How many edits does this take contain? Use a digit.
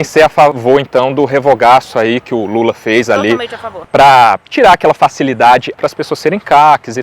2